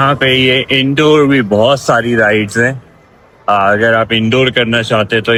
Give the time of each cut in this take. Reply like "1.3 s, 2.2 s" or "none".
none